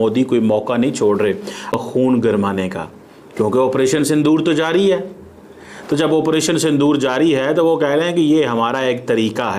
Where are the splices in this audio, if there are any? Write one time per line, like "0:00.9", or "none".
0:01.8

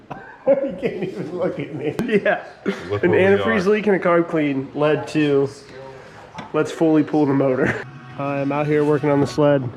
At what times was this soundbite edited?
0:02.0
0:08.0

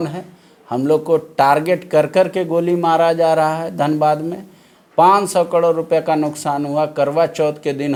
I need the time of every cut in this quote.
none

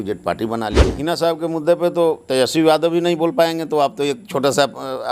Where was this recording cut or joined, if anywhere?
0:00.9

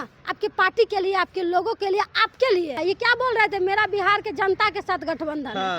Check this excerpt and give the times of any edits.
0:02.8

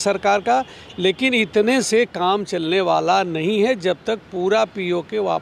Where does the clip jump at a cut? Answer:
none

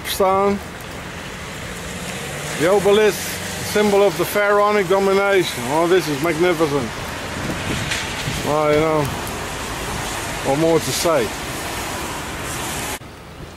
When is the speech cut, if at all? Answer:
0:01.6

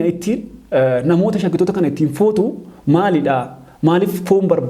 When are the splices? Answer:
none

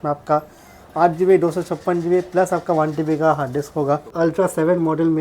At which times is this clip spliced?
0:04.1

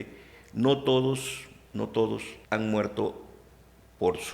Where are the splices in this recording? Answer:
0:02.3

